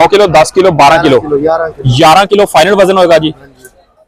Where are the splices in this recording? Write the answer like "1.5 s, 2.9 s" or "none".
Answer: none